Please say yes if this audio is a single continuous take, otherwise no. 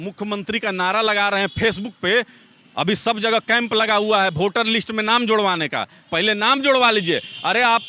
yes